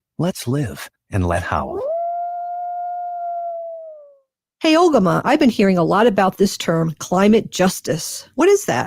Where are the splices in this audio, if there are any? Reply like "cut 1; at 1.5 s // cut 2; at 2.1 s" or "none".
cut 1; at 4.4 s